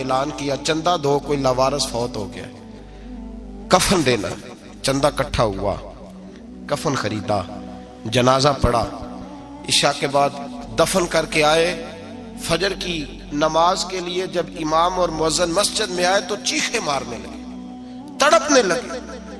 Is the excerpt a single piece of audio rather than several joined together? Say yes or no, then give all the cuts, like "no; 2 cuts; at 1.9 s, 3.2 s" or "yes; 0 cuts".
yes; 0 cuts